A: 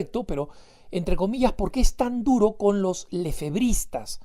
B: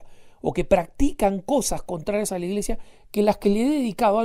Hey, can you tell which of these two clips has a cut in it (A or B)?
A